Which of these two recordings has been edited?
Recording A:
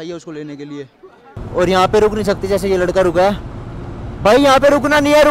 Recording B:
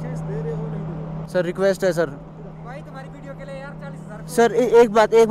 A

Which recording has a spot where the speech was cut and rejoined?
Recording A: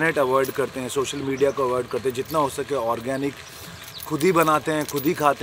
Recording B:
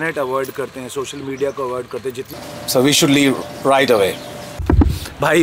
B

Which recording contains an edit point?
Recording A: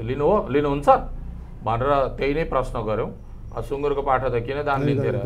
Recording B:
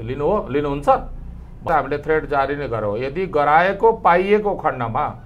B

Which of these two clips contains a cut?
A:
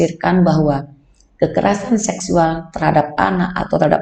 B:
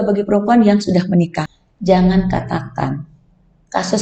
B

